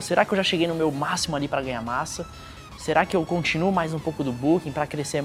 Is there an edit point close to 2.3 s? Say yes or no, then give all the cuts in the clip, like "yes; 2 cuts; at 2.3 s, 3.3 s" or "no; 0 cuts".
no; 0 cuts